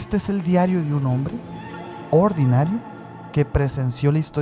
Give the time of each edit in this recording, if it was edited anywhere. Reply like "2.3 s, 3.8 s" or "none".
none